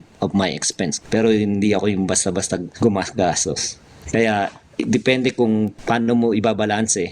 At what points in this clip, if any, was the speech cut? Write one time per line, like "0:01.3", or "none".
0:01.0
0:02.7
0:05.8